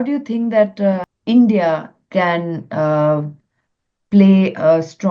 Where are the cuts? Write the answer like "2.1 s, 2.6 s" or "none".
1.1 s